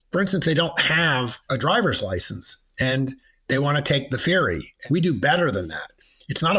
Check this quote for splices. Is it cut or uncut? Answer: cut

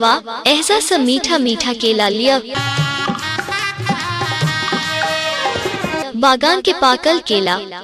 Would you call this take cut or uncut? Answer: uncut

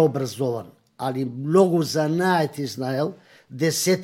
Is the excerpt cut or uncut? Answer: uncut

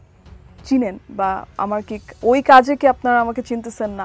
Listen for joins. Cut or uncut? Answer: uncut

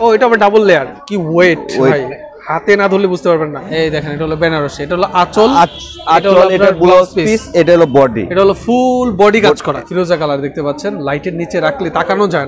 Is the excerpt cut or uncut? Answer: cut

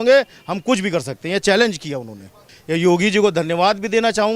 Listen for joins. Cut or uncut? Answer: cut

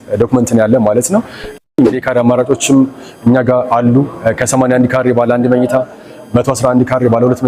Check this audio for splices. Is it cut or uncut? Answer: cut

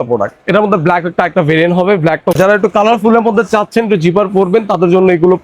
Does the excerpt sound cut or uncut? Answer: cut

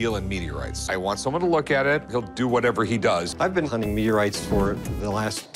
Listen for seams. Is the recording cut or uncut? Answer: uncut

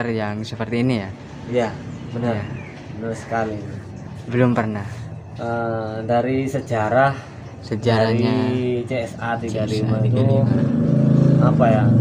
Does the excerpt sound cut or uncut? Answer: uncut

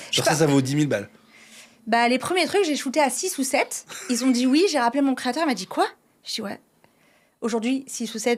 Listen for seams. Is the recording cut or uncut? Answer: uncut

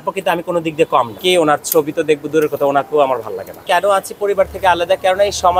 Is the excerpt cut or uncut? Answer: cut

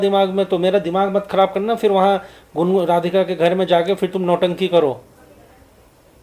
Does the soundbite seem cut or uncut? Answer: uncut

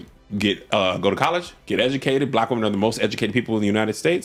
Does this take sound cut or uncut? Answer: uncut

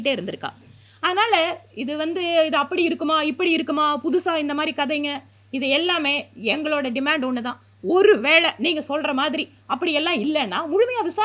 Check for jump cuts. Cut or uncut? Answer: uncut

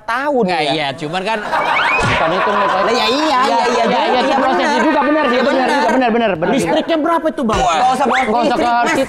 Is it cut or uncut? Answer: uncut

